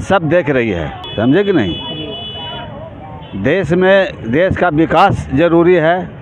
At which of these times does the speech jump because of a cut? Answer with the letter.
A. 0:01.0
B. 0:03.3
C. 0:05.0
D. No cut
A